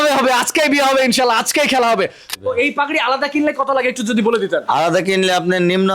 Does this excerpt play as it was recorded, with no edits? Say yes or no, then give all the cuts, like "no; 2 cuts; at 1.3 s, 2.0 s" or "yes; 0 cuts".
no; 1 cut; at 2.3 s